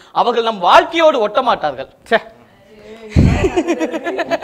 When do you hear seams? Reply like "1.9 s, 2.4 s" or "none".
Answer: none

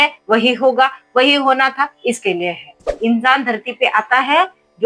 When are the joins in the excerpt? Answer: 2.9 s

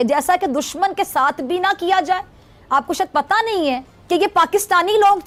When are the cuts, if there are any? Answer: none

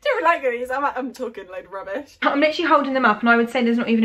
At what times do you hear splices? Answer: 2.2 s

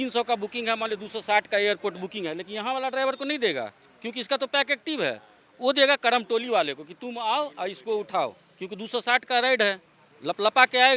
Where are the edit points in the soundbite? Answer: none

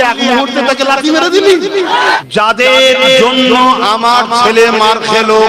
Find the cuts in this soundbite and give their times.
2.2 s

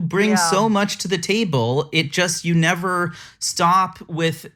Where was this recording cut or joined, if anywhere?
none

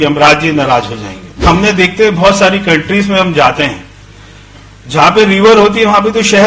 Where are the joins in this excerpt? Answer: 1.4 s

